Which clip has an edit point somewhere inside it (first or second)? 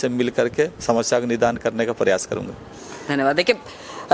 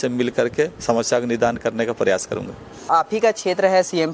second